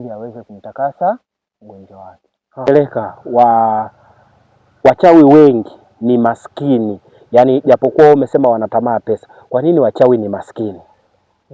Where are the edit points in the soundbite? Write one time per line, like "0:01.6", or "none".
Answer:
0:02.7